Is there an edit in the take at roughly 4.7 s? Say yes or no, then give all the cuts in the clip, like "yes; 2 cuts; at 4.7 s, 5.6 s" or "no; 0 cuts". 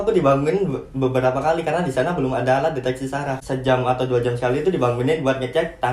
no; 1 cut; at 3.4 s